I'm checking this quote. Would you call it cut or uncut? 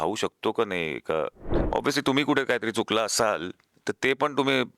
cut